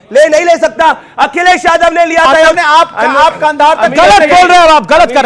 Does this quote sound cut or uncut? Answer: cut